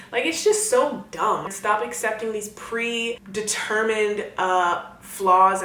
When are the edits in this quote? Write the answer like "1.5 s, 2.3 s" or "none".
1.5 s, 3.2 s